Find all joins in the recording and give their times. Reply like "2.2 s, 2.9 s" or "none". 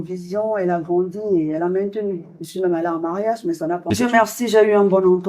3.9 s